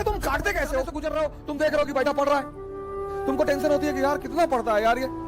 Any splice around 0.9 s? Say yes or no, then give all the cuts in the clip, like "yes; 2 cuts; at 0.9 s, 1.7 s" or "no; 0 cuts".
yes; 1 cut; at 0.9 s